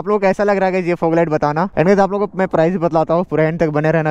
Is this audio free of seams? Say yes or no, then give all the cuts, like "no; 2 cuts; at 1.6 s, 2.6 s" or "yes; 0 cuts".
no; 1 cut; at 1.7 s